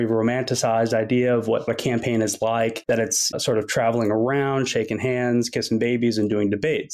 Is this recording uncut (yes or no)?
no